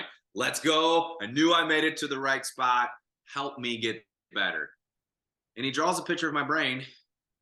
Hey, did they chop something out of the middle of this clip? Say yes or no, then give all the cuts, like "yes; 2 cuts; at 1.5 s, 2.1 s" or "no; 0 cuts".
no; 0 cuts